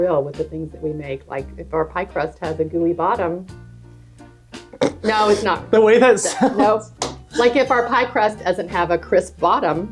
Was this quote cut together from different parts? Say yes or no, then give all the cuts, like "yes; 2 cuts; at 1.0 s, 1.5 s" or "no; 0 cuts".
no; 0 cuts